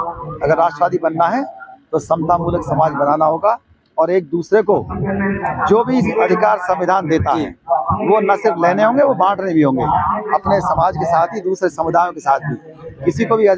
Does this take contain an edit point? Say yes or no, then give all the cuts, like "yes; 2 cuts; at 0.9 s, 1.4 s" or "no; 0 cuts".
no; 0 cuts